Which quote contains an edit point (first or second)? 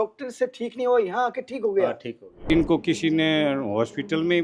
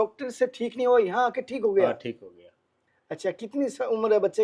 first